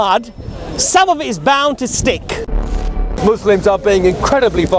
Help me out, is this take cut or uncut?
cut